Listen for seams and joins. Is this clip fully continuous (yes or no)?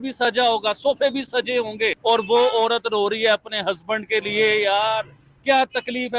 no